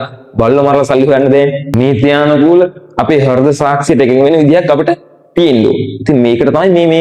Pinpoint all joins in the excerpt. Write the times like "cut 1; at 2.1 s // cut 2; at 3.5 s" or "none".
cut 1; at 1.7 s

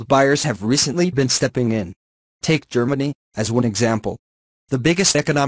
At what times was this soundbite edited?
cut 1; at 3.0 s

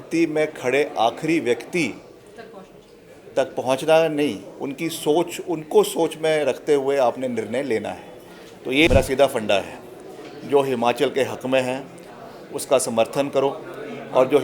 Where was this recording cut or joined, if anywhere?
cut 1; at 8.9 s

